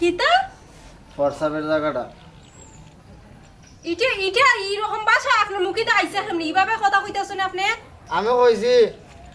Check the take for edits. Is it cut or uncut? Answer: cut